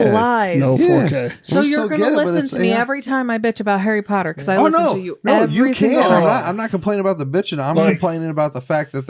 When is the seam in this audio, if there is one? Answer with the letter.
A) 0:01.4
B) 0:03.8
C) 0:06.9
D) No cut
A